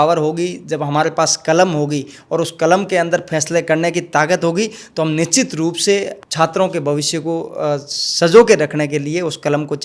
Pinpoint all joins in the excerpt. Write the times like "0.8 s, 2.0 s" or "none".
6.2 s